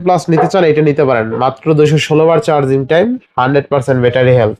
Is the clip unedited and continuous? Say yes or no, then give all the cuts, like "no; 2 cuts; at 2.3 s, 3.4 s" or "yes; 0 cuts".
yes; 0 cuts